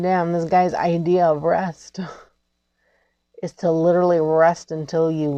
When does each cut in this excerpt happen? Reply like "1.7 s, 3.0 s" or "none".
none

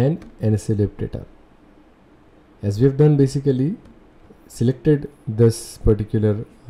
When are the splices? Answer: none

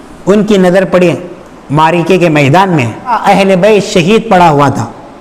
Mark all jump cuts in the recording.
3.2 s

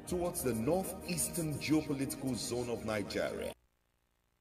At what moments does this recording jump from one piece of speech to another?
3.5 s

